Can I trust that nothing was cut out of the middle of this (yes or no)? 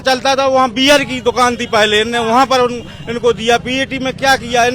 yes